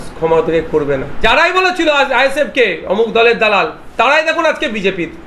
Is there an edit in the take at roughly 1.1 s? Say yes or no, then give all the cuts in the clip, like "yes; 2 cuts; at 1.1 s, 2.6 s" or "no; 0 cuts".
yes; 1 cut; at 1.1 s